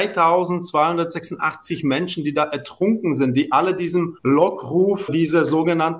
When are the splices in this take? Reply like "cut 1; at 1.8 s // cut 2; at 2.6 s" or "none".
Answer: cut 1; at 4.1 s // cut 2; at 5.1 s

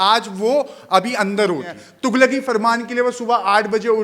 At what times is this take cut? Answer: cut 1; at 1.8 s

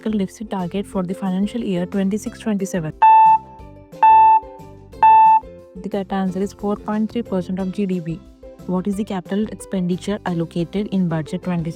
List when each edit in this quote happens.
cut 1; at 2.9 s // cut 2; at 5.6 s // cut 3; at 8.3 s

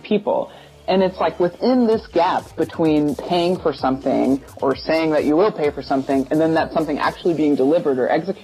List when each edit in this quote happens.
cut 1; at 3.1 s // cut 2; at 4.6 s

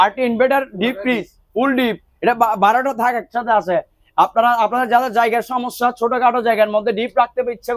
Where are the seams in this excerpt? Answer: none

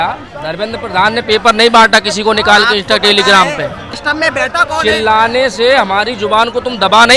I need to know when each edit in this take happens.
cut 1; at 3.9 s

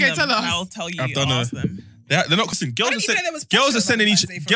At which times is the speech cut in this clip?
cut 1; at 2.5 s

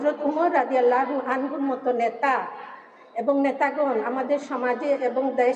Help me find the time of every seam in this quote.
none

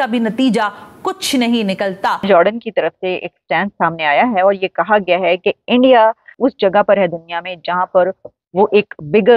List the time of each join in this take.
cut 1; at 2.3 s // cut 2; at 6.3 s

